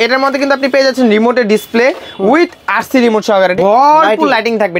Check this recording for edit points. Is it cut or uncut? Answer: cut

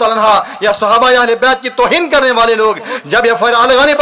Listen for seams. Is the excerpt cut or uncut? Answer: uncut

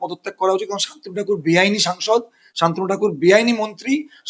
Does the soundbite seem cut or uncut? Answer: uncut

